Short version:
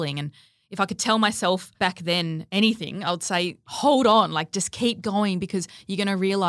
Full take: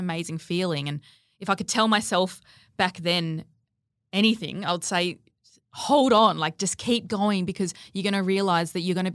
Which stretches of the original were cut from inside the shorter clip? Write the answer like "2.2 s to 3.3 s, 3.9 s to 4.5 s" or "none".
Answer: 2.6 s to 3.5 s, 5.3 s to 5.7 s

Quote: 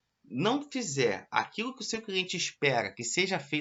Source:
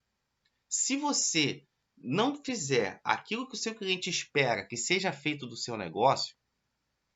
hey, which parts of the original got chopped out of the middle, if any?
none

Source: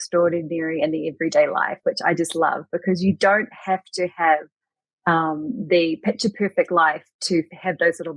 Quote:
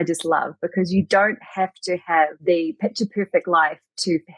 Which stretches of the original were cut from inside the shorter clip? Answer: 4.5 s to 5.6 s

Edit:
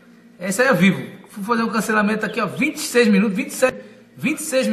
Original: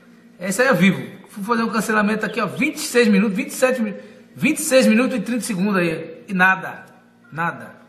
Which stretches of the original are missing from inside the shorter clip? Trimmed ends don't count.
3.7 s to 3.9 s

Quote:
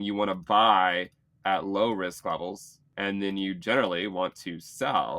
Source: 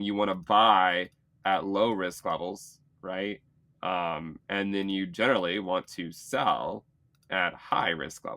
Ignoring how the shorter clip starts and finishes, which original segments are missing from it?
2.8 s to 4.3 s

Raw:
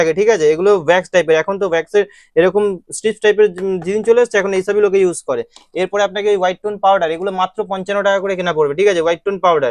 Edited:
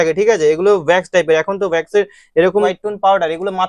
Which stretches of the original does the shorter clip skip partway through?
2.8 s to 6.6 s

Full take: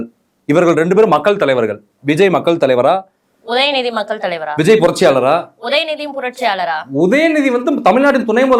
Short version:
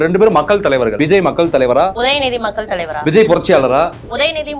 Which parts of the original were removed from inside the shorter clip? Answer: 1.7 s to 2.0 s, 3.0 s to 3.5 s

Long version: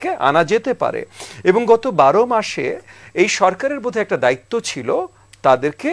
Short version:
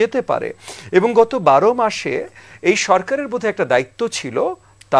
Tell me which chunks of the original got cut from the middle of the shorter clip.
none

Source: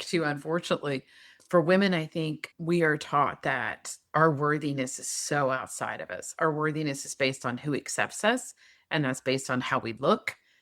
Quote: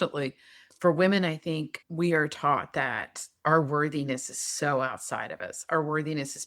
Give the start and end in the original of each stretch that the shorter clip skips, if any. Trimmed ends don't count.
none

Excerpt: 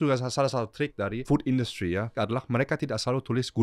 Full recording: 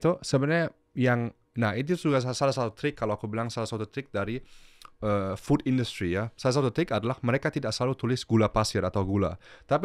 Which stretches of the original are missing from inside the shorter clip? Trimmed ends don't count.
3.0 s to 5.2 s, 6.3 s to 6.9 s

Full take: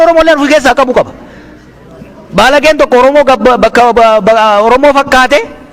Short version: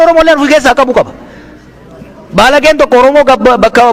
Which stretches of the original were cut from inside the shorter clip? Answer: none

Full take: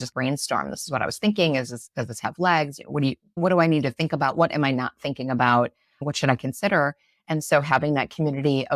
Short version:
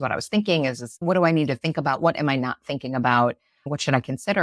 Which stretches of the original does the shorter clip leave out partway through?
1.8 s to 3.3 s

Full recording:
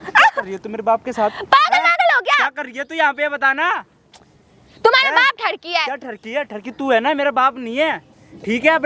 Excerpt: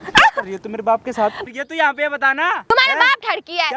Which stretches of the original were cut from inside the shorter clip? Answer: 1.4 s to 2.6 s, 3.9 s to 4.9 s

